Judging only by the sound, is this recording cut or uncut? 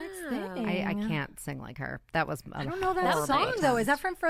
uncut